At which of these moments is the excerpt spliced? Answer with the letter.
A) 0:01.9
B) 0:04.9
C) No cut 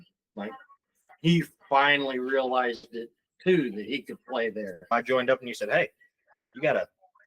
B